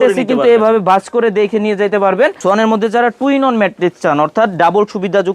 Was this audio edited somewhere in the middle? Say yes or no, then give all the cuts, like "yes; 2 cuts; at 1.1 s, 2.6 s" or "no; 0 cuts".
yes; 1 cut; at 2.4 s